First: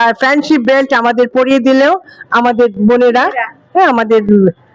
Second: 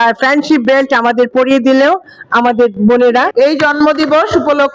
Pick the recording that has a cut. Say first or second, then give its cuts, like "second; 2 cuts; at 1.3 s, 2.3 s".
second; 1 cut; at 3.3 s